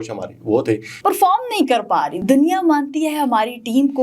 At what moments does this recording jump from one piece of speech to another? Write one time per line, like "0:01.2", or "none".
0:00.9
0:02.1